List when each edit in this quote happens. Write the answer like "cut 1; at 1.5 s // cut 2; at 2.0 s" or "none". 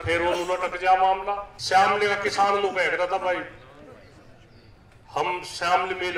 cut 1; at 1.5 s